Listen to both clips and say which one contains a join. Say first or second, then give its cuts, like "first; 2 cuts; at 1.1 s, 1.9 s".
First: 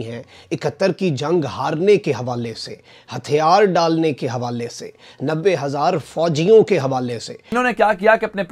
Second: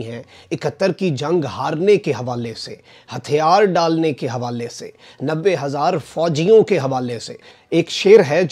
first; 1 cut; at 7.5 s